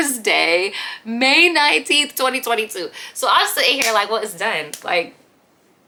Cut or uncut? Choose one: uncut